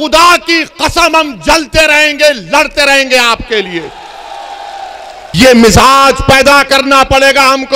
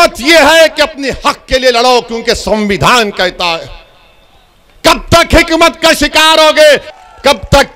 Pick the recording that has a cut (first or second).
first